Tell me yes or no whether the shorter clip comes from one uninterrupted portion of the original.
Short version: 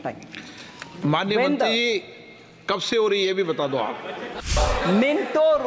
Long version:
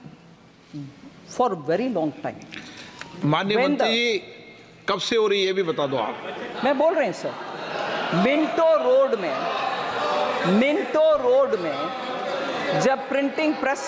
no